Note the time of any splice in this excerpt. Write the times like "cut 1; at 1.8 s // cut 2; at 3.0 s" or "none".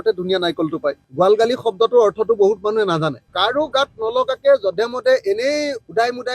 cut 1; at 1.0 s // cut 2; at 3.3 s